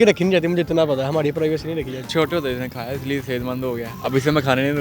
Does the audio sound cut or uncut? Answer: cut